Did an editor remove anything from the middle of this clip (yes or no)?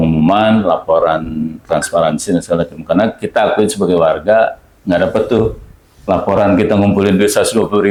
no